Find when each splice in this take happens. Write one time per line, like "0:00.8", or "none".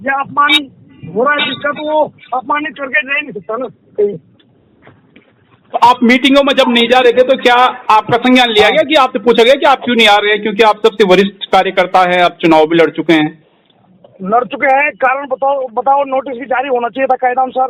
none

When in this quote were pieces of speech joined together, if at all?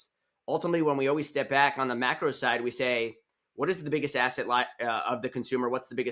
none

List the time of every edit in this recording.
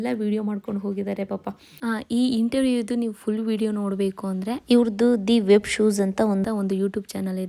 0:01.7

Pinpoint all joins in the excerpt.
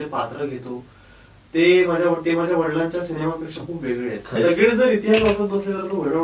0:04.4

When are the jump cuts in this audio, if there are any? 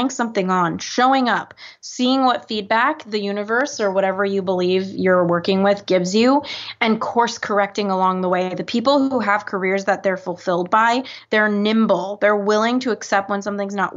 none

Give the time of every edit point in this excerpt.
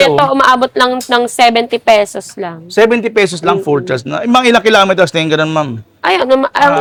none

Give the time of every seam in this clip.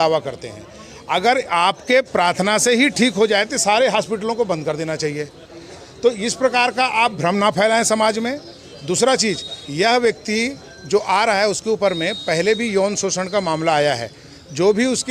none

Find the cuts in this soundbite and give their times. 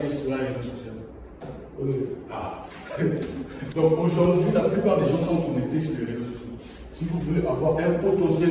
0:03.6

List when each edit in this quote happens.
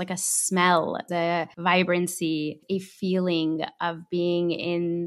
0:01.3
0:02.6

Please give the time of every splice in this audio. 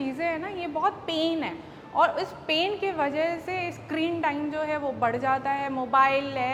none

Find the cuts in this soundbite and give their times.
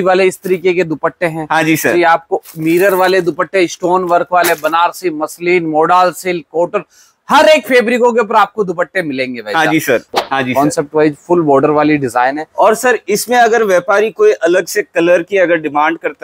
0:10.1

